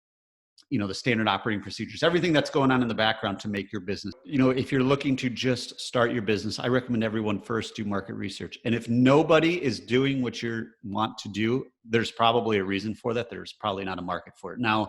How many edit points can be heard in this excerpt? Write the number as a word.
one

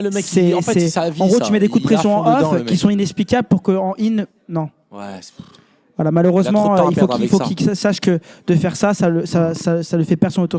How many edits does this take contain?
zero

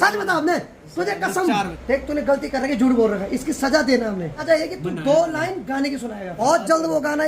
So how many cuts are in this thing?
three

